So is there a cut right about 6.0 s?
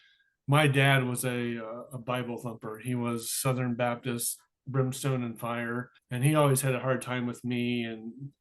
yes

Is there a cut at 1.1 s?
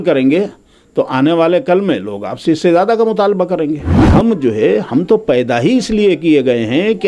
no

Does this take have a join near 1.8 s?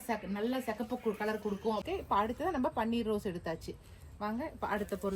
yes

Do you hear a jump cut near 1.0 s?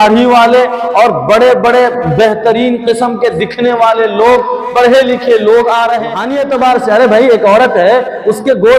no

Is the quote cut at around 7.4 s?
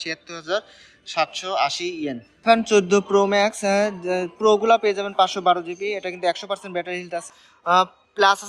yes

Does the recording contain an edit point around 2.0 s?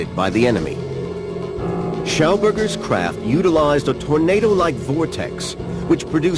yes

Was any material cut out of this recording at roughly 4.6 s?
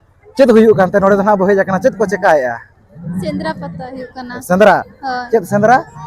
no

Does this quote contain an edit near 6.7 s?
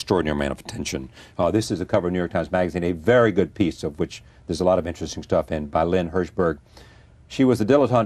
no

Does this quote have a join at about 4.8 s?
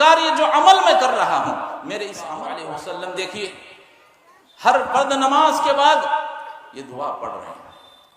no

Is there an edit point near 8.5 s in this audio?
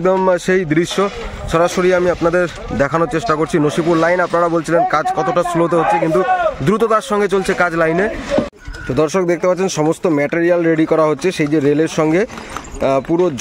yes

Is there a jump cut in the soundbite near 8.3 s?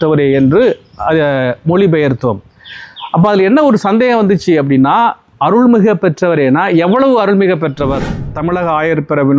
yes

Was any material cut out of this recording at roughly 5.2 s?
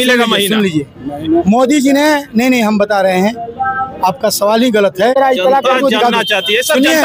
yes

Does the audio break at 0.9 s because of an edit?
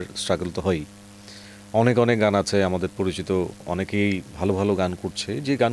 no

